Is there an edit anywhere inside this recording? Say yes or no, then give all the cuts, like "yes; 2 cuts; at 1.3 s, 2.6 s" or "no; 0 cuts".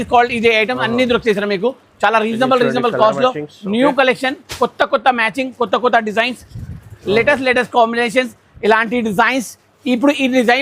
no; 0 cuts